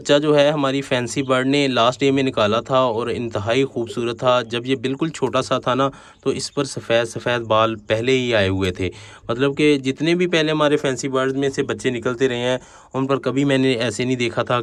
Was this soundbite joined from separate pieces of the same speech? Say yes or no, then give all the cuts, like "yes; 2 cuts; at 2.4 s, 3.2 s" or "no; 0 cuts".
no; 0 cuts